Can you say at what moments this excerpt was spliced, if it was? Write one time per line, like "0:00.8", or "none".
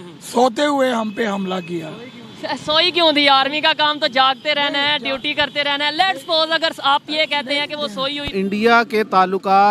0:08.3